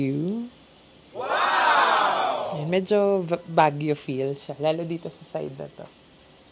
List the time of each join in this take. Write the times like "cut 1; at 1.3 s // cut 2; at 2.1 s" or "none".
cut 1; at 1.1 s // cut 2; at 2.6 s